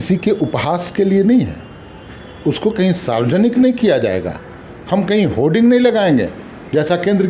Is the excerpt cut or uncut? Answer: uncut